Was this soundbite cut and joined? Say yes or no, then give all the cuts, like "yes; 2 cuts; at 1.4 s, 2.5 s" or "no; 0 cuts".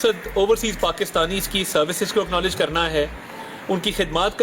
no; 0 cuts